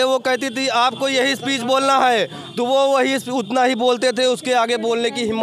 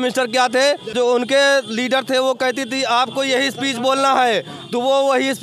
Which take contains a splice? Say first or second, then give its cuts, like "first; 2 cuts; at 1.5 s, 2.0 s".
second; 1 cut; at 0.9 s